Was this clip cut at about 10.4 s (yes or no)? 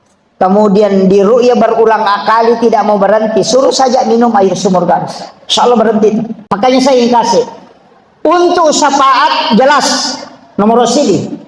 no